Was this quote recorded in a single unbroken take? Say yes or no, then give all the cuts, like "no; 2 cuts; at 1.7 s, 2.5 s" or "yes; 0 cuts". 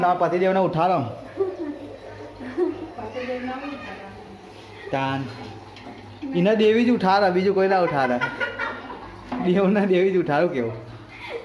yes; 0 cuts